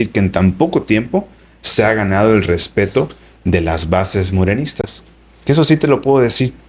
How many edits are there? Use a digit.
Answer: 0